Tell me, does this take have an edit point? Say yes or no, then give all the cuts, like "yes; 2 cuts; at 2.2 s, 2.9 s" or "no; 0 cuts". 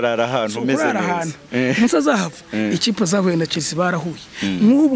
no; 0 cuts